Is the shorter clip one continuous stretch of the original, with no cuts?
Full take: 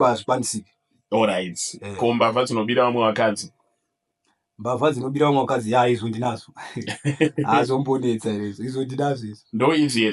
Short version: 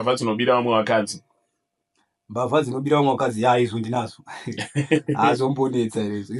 yes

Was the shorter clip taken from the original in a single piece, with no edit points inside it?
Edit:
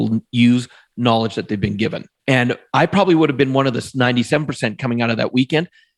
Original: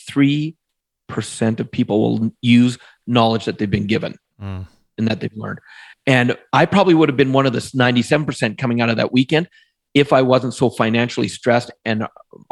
no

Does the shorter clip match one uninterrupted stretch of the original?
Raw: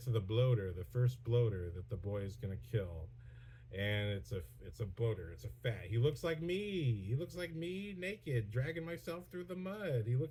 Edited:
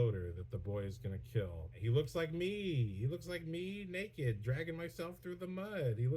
no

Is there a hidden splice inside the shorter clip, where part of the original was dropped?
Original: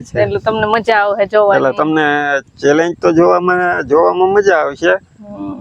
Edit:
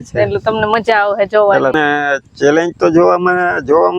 yes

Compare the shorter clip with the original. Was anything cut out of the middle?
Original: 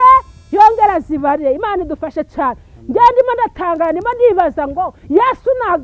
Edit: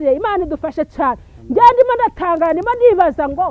no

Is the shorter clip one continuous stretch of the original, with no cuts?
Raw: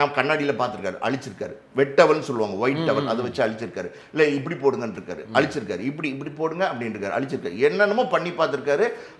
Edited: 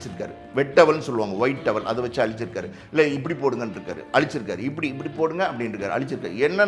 yes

